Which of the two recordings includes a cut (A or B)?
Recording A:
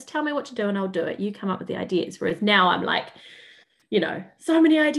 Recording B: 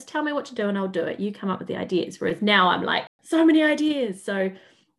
B